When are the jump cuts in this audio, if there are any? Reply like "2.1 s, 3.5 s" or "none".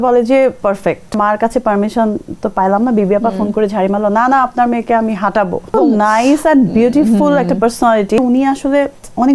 1.1 s, 5.7 s, 8.2 s